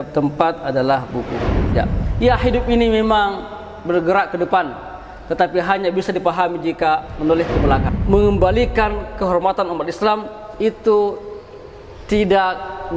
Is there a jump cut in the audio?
yes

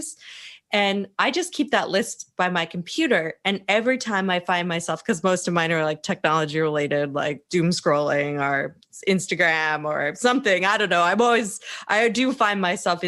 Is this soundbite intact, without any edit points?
yes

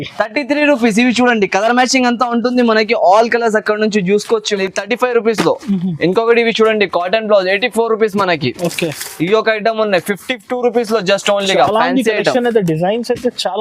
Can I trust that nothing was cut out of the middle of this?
no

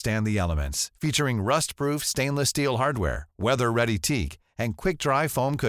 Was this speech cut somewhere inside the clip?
no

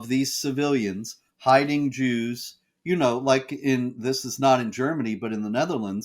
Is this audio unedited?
yes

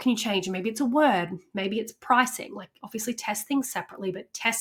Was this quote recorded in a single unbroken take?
yes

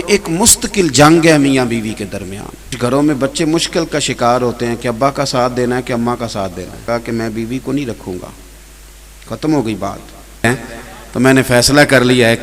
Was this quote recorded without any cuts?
no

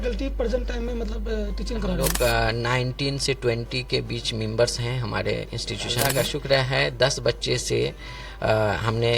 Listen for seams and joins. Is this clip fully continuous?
no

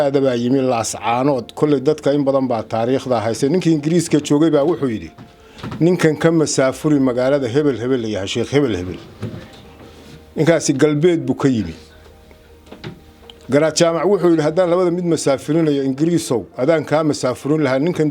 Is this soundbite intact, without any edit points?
yes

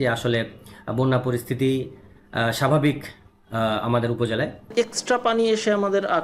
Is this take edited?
no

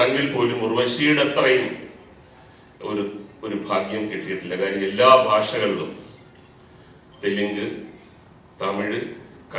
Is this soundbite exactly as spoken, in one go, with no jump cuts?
yes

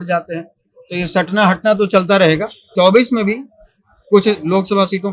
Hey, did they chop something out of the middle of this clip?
yes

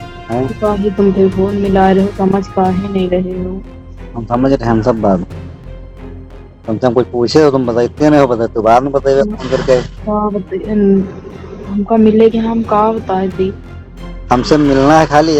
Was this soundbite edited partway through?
no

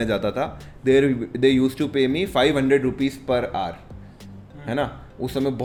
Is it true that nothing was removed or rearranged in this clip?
yes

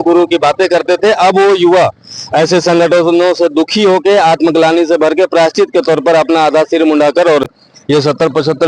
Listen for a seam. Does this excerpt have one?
no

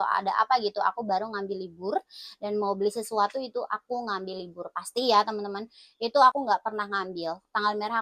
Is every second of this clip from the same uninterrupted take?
no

